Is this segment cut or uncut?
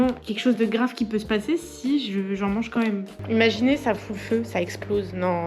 cut